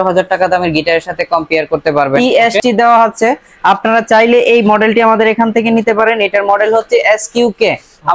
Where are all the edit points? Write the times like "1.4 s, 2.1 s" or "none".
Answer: 2.2 s